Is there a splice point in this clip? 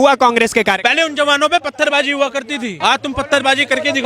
yes; 2 cuts; at 0.8 s, 2.8 s

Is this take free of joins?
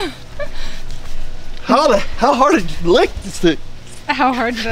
yes; 0 cuts

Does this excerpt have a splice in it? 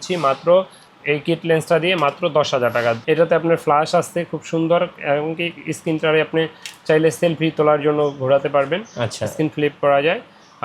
yes; 1 cut; at 3.0 s

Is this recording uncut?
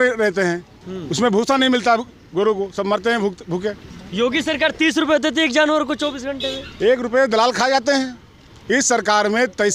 yes; 0 cuts

